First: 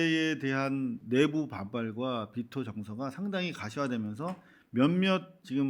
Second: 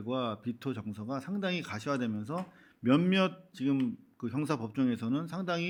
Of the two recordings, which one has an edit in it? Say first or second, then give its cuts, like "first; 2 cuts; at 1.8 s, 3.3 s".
first; 1 cut; at 1.0 s